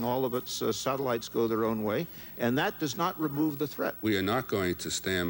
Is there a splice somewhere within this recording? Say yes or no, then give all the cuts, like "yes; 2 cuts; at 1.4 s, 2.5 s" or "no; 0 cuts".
yes; 1 cut; at 4.0 s